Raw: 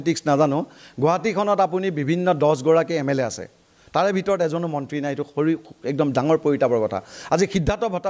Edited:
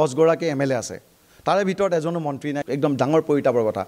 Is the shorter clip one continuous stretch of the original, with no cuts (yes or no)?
no